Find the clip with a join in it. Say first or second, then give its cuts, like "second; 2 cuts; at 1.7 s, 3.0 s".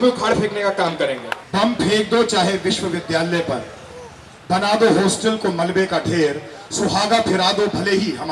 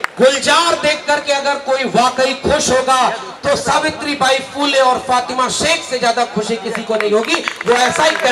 first; 1 cut; at 1.3 s